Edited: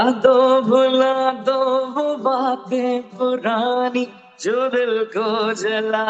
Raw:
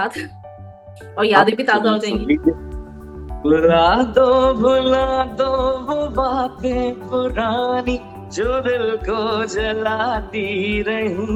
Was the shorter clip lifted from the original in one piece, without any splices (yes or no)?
yes